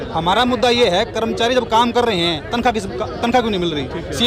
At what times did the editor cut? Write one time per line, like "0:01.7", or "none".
none